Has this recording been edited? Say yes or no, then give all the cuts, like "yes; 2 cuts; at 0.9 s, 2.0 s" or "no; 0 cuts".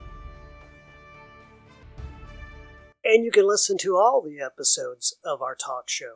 no; 0 cuts